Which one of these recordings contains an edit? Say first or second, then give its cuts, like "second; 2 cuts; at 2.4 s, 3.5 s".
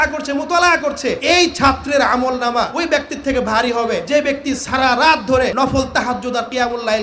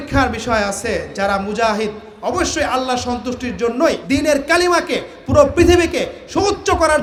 first; 4 cuts; at 1.2 s, 2.7 s, 4.0 s, 5.5 s